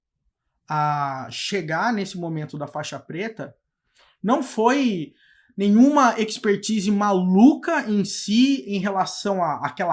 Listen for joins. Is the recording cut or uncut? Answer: uncut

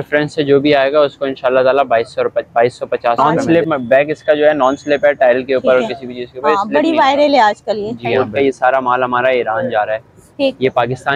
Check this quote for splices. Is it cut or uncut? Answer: cut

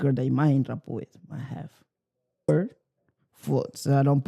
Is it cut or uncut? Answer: cut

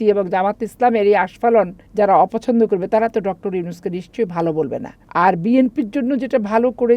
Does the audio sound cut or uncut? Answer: cut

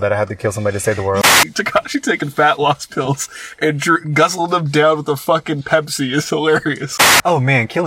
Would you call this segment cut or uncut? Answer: cut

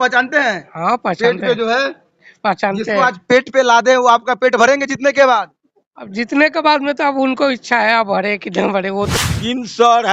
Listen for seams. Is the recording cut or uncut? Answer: cut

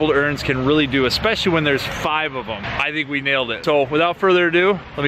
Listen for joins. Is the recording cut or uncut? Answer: cut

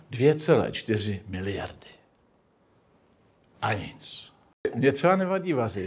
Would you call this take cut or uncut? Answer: cut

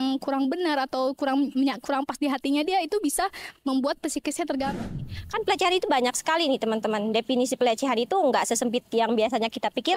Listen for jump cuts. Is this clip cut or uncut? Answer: cut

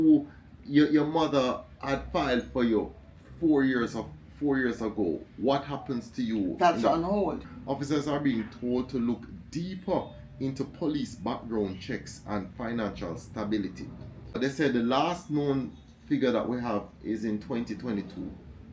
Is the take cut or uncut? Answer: cut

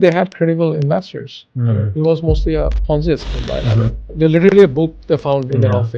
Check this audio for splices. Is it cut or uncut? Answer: cut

